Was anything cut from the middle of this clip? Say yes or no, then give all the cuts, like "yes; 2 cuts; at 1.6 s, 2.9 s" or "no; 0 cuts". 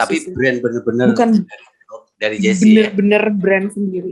no; 0 cuts